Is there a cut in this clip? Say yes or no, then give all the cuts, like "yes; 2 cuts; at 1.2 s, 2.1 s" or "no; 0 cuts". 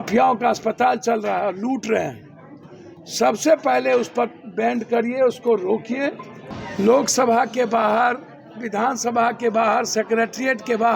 yes; 1 cut; at 6.6 s